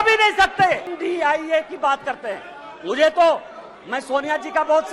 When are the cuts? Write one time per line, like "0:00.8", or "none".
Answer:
0:00.9